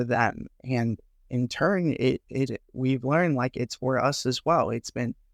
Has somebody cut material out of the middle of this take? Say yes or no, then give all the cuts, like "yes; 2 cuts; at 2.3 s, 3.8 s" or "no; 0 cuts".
no; 0 cuts